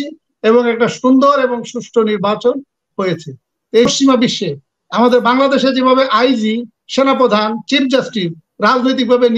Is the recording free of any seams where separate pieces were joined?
no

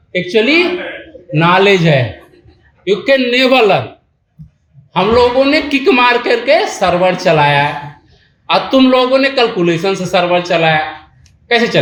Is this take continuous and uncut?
yes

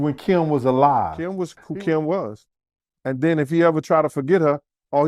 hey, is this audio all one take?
no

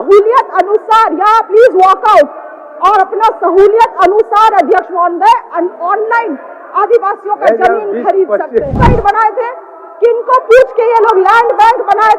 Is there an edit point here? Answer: yes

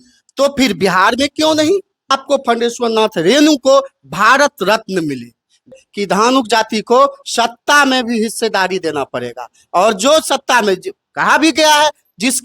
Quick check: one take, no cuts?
no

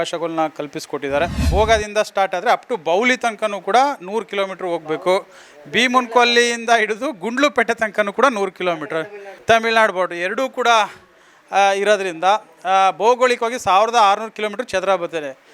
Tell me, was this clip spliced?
yes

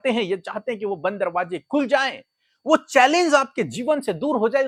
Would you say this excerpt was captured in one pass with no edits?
yes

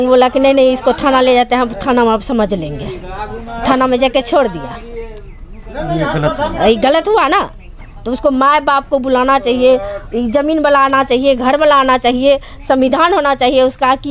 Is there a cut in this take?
no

